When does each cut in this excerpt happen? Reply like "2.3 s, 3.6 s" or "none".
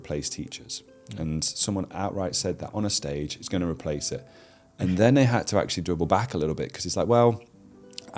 none